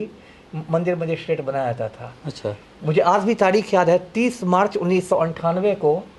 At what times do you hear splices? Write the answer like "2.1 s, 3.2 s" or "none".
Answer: none